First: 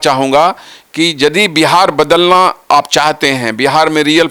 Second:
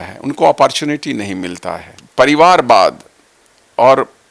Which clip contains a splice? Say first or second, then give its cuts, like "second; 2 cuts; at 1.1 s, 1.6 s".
second; 1 cut; at 1.9 s